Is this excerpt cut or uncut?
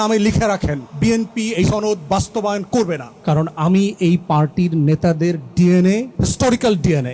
cut